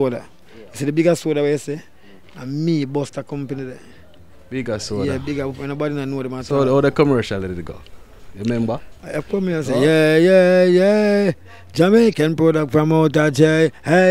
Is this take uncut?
yes; 0 cuts

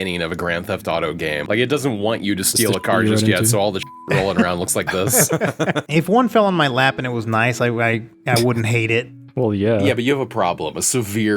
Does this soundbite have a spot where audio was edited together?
yes; 3 cuts; at 1.4 s, 5.8 s, 8.1 s

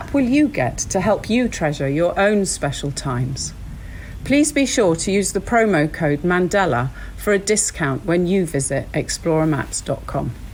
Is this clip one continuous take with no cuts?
yes; 0 cuts

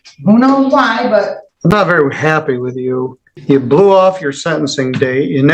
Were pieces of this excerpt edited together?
yes; 2 cuts; at 1.4 s, 3.2 s

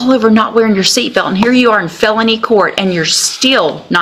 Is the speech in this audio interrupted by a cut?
no; 0 cuts

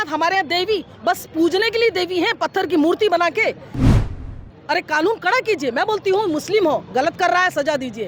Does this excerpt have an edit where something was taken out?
yes; 1 cut; at 4.0 s

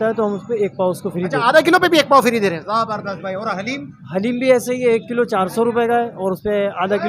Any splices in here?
no; 0 cuts

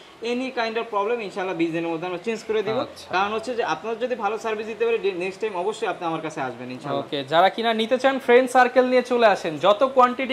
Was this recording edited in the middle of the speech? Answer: no; 0 cuts

